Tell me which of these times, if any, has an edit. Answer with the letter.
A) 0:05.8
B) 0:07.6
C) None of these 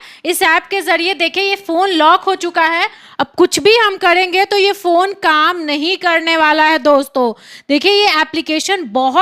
C